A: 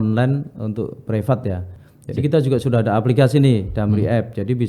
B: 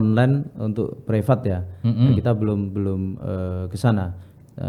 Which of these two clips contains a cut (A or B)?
A